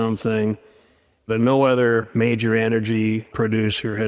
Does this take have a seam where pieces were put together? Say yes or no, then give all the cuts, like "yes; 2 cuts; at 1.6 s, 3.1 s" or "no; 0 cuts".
yes; 1 cut; at 1.3 s